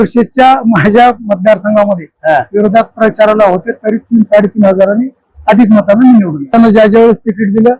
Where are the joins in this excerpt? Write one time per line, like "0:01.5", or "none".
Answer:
0:06.5